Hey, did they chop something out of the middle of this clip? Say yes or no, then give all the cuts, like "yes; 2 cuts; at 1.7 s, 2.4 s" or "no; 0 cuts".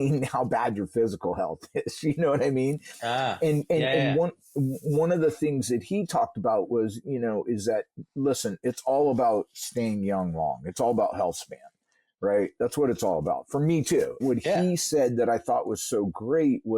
yes; 1 cut; at 14.2 s